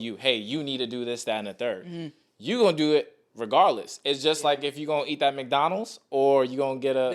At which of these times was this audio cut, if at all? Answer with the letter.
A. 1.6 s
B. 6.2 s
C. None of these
C